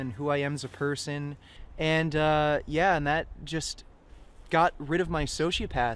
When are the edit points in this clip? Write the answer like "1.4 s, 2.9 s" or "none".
none

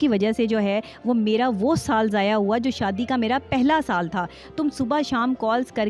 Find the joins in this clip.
none

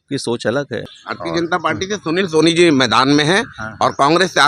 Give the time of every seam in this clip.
1.0 s

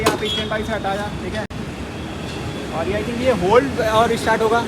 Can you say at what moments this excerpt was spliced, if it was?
none

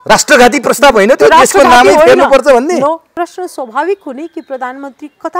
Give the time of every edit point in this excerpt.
3.1 s

